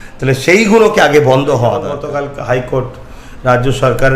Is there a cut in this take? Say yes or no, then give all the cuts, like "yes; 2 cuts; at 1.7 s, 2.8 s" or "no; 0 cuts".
yes; 1 cut; at 2.0 s